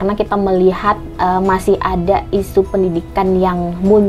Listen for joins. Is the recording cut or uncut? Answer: uncut